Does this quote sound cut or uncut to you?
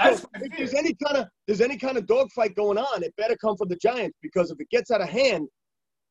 uncut